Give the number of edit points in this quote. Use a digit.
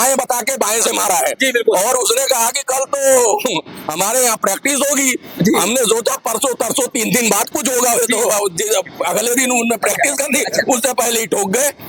0